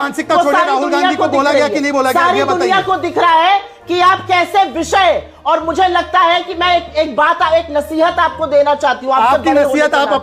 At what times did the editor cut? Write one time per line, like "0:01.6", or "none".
none